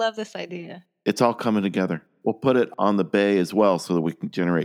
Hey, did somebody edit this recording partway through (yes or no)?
yes